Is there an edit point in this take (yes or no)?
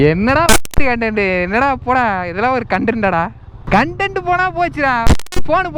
yes